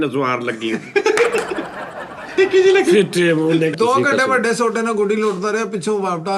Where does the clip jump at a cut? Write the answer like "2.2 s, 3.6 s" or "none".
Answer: 3.7 s